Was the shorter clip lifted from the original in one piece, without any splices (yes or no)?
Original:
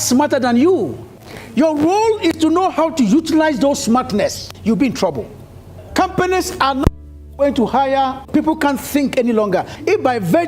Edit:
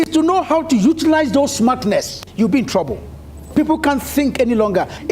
no